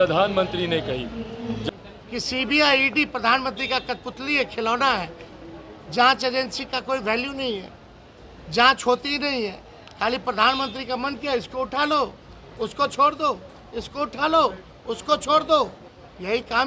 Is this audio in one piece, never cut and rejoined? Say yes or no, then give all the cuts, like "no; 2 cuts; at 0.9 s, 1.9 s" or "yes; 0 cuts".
no; 1 cut; at 1.6 s